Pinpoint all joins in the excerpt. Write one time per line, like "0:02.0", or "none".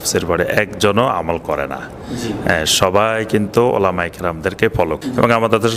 0:04.7

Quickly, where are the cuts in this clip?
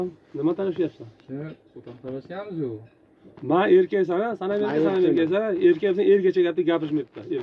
none

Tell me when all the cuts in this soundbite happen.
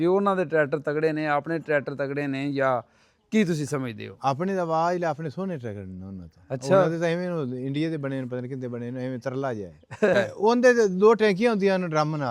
0:10.1

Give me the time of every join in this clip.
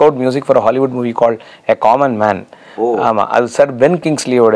none

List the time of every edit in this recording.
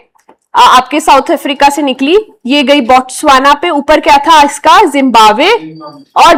none

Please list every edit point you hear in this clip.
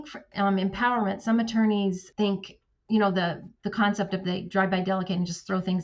0:02.0

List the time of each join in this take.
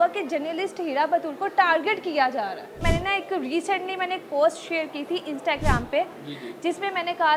0:02.8

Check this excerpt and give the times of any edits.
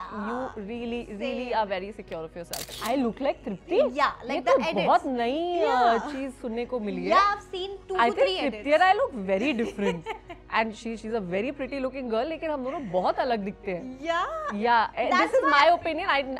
0:02.7

